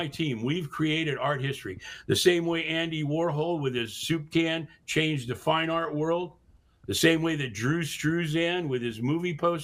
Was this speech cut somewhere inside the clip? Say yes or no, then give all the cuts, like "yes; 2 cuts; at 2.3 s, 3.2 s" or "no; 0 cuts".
no; 0 cuts